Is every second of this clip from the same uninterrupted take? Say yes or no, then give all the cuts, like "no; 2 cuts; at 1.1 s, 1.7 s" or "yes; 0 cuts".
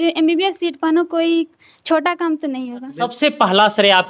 no; 1 cut; at 3.0 s